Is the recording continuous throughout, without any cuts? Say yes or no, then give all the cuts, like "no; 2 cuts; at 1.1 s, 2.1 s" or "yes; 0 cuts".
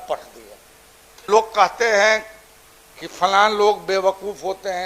no; 1 cut; at 1.2 s